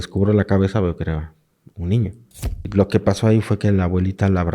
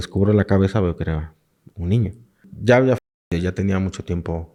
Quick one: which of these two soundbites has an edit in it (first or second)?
first